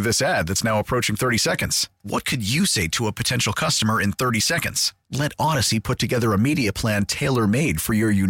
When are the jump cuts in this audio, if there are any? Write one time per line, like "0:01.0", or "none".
none